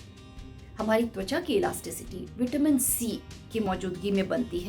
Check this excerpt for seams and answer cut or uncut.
cut